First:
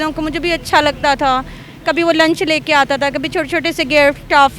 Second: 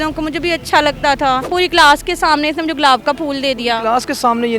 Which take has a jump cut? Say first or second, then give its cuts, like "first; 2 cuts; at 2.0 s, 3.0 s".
second; 1 cut; at 1.5 s